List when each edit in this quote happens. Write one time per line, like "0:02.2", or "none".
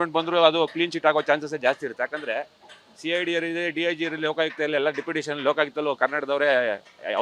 none